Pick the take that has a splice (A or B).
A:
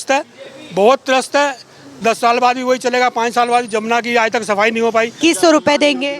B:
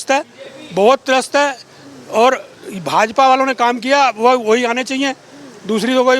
A